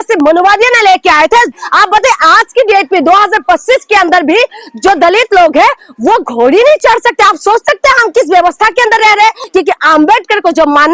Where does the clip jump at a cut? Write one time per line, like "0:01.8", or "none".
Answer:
0:01.5
0:09.4

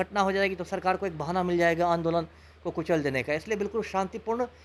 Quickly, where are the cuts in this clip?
none

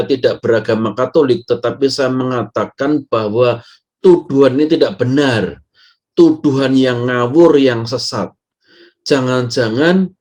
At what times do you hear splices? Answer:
none

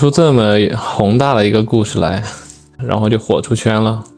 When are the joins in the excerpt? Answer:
0:02.7

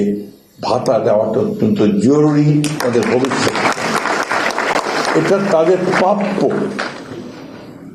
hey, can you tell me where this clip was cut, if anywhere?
none

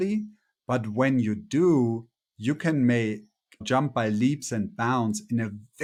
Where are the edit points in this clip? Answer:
none

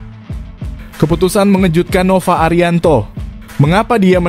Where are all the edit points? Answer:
0:01.0

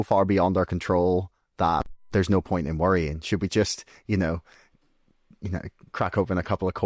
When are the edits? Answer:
none

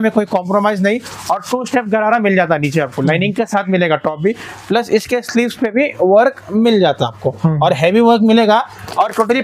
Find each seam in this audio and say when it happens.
none

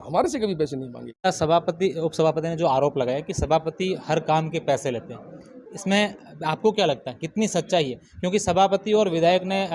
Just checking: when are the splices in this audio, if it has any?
0:01.2

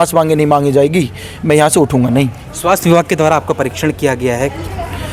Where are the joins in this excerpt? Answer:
none

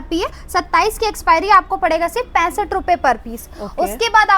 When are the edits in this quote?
none

